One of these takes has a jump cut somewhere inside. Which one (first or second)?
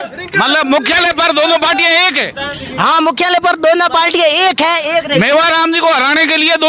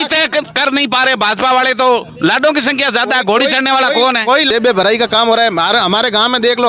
second